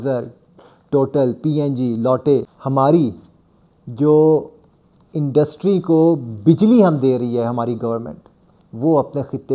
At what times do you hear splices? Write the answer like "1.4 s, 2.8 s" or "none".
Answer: 2.6 s

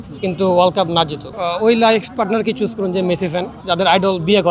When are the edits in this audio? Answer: 1.3 s, 3.6 s

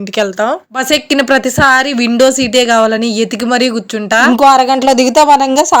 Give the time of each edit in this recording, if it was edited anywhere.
0.7 s, 4.2 s

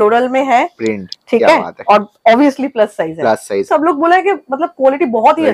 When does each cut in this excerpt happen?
3.7 s

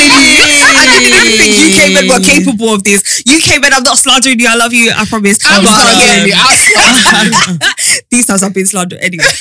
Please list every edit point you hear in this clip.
none

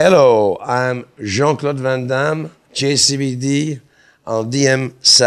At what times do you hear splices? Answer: none

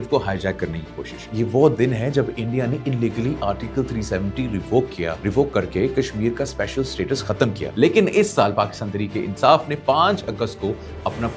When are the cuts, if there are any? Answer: 1.3 s, 5.2 s, 7.6 s

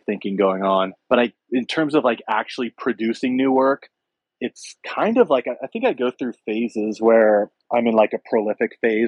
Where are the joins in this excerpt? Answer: 1.3 s, 7.6 s

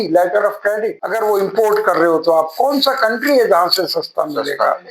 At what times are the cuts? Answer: 1.0 s

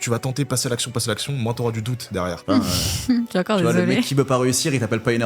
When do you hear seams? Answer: 2.4 s

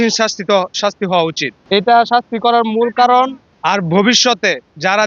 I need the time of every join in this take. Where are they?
none

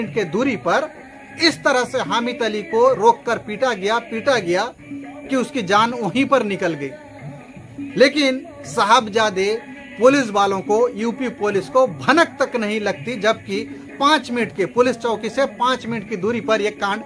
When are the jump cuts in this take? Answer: none

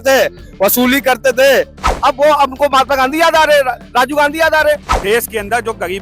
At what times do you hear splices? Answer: 1.9 s, 4.9 s

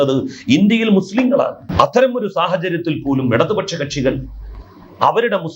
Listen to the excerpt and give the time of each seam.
1.6 s

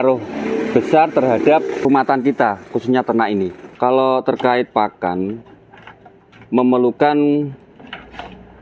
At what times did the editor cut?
1.8 s, 3.6 s

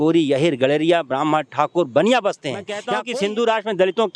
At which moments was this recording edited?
2.9 s

